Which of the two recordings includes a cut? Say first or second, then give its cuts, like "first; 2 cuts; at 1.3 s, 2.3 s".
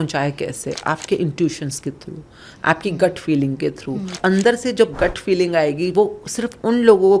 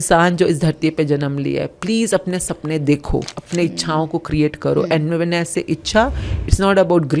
first; 1 cut; at 4.2 s